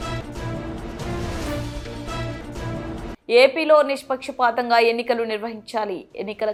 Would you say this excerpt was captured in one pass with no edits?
yes; 0 cuts

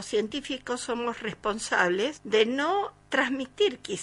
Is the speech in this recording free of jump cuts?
no; 2 cuts; at 2.2 s, 3.0 s

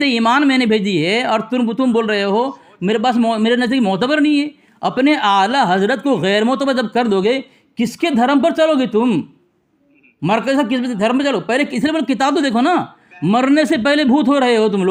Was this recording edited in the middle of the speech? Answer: no; 0 cuts

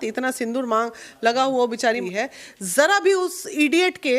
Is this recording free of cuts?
no; 1 cut; at 2.0 s

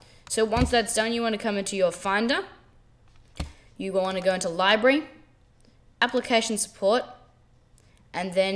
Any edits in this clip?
yes; 1 cut; at 4.1 s

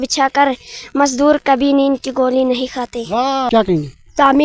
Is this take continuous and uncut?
no; 1 cut; at 3.5 s

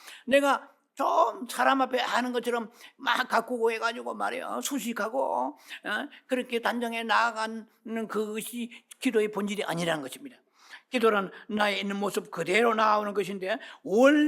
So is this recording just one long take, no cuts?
yes; 0 cuts

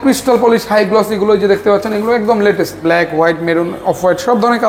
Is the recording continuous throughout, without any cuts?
no; 1 cut; at 2.8 s

